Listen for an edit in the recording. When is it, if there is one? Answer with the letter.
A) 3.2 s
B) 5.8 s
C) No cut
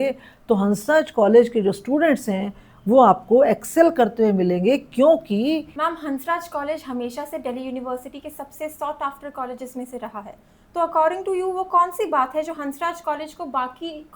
B